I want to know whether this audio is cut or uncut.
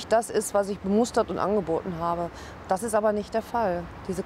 uncut